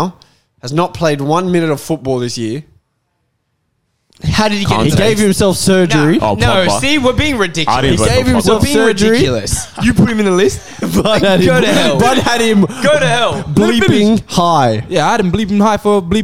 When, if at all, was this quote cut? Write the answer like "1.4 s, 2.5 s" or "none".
none